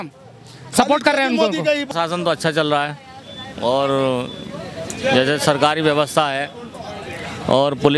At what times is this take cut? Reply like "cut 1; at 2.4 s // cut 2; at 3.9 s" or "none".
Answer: cut 1; at 1.9 s